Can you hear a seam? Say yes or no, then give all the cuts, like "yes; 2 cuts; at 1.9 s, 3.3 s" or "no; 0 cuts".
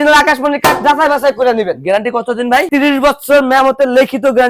no; 0 cuts